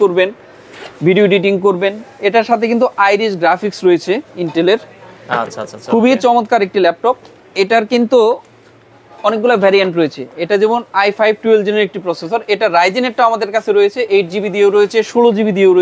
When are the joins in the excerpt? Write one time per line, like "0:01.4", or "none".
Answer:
none